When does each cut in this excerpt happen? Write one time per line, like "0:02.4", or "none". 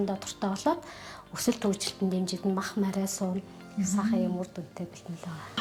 none